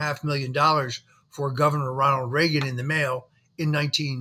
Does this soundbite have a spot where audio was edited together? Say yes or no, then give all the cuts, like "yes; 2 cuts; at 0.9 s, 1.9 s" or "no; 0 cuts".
no; 0 cuts